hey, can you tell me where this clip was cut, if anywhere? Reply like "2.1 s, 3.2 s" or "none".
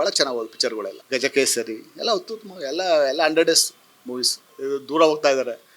1.0 s, 4.5 s